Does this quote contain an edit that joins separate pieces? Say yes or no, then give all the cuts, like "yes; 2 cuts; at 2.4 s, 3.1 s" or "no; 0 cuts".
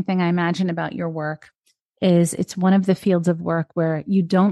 no; 0 cuts